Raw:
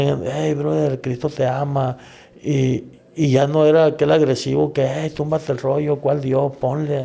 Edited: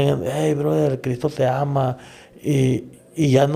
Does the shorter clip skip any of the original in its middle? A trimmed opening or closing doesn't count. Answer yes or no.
no